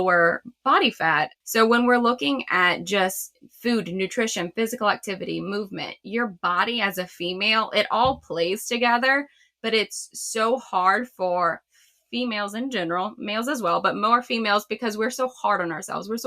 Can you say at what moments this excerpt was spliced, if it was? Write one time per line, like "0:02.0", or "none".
0:01.4